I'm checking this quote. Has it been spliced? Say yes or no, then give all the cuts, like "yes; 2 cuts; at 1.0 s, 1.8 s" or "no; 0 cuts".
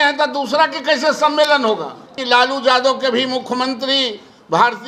yes; 1 cut; at 2.1 s